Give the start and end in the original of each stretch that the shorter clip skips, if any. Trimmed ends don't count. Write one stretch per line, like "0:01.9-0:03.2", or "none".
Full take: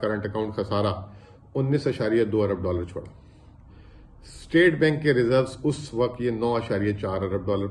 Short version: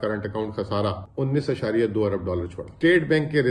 0:01.0-0:01.4
0:03.0-0:04.3

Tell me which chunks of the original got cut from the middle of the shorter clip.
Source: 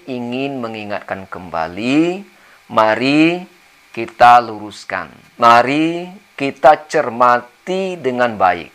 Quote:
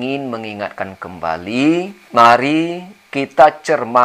0:02.3-0:05.2

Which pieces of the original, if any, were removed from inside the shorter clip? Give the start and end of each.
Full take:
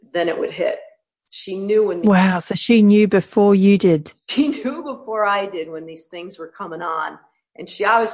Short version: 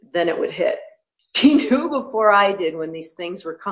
0:01.2-0:04.2

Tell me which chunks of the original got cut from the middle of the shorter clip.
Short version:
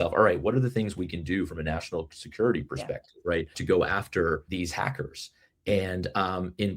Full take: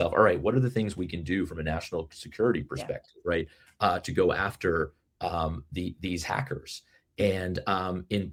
0:03.6-0:04.1
0:04.9-0:06.0

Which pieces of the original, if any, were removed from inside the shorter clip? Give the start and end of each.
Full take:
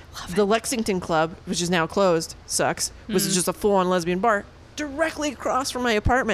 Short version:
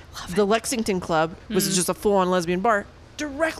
0:01.4-0:03.0

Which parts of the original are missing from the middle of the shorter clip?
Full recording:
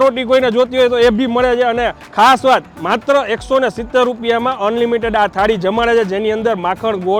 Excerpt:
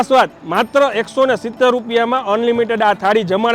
none

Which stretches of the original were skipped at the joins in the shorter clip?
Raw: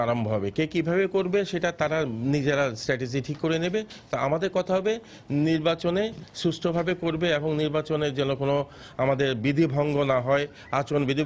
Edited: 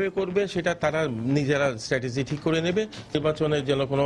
0:04.1-0:07.6

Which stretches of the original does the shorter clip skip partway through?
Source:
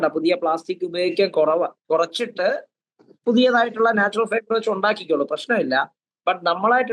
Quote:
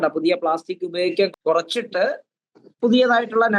0:01.3-0:01.7

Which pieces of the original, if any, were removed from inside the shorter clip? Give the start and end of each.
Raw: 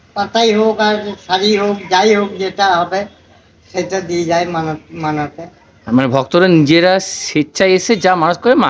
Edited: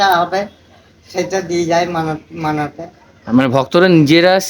none

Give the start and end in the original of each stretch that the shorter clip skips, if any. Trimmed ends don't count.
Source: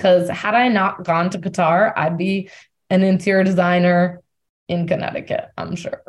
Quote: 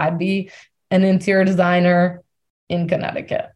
none

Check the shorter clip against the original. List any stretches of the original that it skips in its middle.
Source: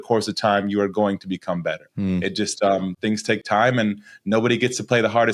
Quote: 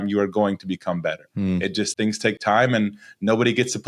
0:02.5-0:03.0

